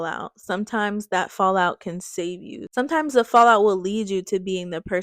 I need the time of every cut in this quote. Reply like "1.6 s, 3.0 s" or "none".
none